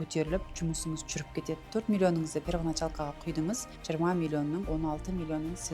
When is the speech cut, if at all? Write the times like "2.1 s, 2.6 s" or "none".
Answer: 1.7 s, 3.7 s, 4.7 s